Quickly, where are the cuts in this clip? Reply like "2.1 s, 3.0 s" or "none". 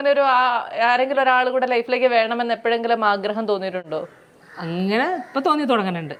none